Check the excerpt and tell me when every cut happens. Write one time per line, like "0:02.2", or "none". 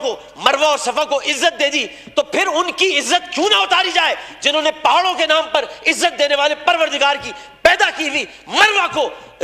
none